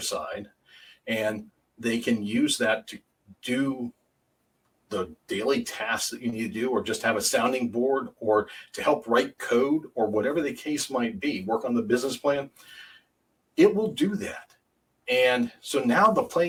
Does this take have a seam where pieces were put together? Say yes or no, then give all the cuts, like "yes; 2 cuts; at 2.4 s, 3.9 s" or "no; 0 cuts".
no; 0 cuts